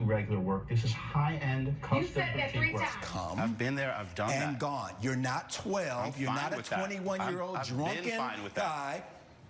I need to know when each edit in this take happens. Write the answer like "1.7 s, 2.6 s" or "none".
3.0 s